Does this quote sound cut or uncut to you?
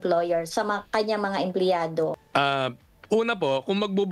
cut